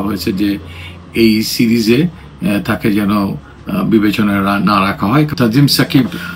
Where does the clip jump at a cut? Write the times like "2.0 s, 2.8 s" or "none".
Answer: 5.3 s